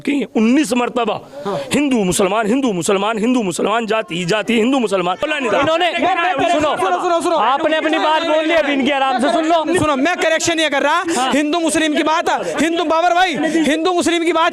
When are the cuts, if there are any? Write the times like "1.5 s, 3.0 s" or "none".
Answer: 5.3 s